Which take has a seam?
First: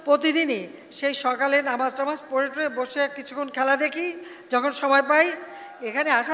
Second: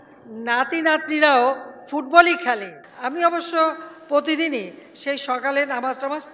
second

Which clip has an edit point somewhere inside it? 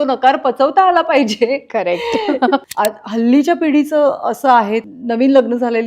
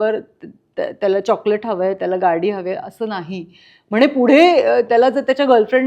first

